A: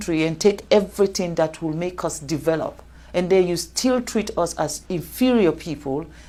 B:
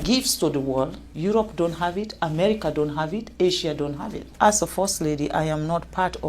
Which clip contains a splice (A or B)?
B